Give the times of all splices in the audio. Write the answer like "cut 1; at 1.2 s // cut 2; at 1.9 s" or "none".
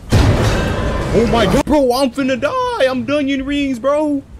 cut 1; at 1.2 s